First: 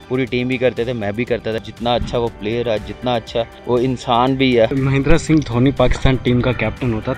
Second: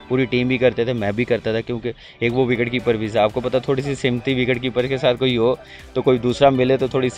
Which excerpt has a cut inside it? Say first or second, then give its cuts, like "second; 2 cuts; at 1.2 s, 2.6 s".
first; 3 cuts; at 1.7 s, 3.6 s, 4.7 s